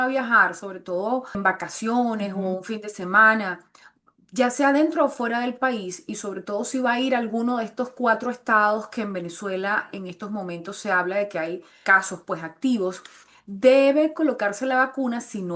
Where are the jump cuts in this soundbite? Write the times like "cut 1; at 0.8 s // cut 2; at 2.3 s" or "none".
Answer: cut 1; at 1.4 s // cut 2; at 11.8 s

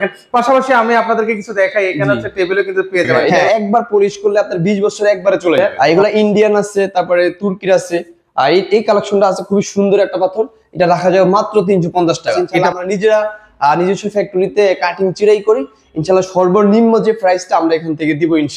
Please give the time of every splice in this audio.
cut 1; at 3.4 s // cut 2; at 5.7 s // cut 3; at 12.6 s

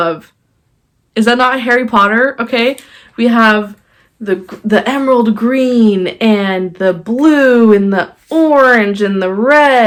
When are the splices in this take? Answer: none

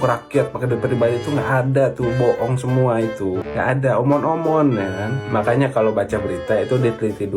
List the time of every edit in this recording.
cut 1; at 3.5 s

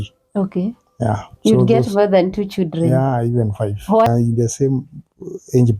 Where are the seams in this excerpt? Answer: cut 1; at 4.1 s

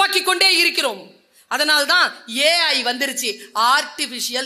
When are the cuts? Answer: none

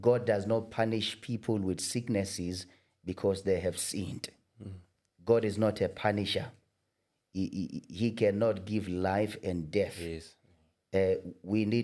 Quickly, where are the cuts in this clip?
none

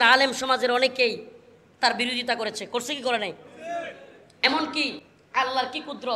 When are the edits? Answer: cut 1; at 5.0 s

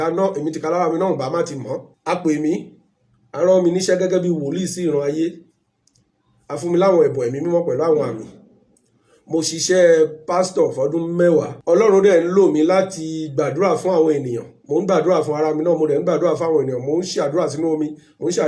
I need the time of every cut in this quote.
cut 1; at 1.9 s // cut 2; at 11.5 s

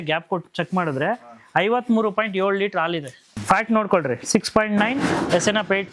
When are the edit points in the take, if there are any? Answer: cut 1; at 3.3 s

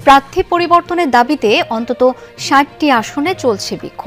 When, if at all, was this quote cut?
none

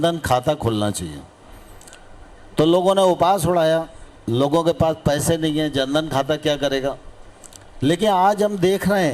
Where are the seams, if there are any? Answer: none

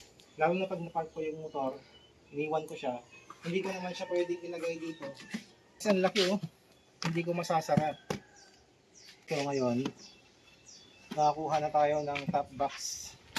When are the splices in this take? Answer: cut 1; at 5.8 s // cut 2; at 9.3 s

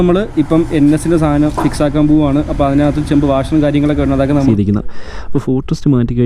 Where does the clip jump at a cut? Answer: cut 1; at 4.3 s

